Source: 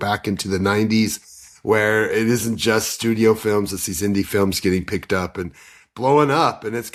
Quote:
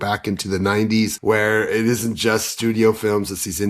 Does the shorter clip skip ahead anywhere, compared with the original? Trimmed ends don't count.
yes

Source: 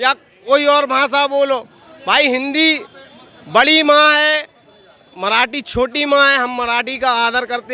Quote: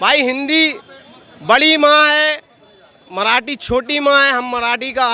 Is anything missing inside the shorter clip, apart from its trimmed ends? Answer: no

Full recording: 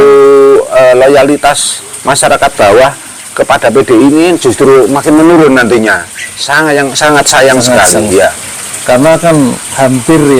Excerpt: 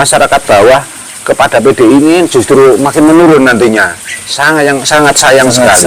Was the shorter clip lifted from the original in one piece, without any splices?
yes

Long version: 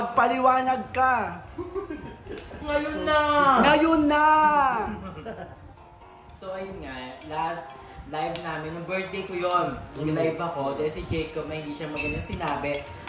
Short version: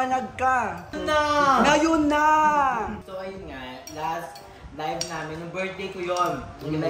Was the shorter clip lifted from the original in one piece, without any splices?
no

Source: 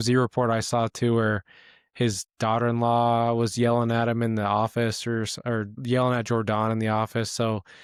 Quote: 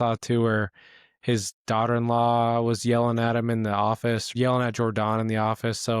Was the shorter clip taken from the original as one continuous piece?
no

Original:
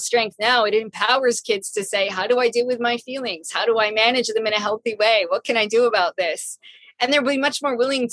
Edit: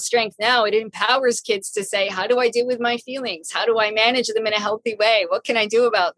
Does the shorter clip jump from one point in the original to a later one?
no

